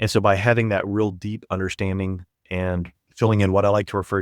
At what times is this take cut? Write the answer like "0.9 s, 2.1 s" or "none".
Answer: none